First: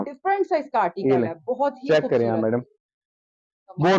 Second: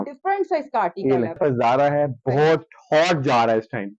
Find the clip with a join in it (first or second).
second